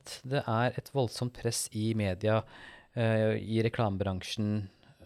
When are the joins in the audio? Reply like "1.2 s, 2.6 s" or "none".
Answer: none